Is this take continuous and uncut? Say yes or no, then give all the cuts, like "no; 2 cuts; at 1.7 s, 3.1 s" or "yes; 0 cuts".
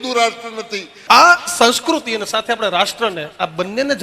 no; 1 cut; at 0.9 s